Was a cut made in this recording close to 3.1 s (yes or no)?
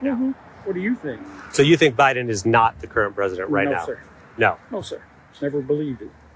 yes